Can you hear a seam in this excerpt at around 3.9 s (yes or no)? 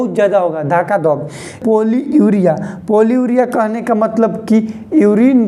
no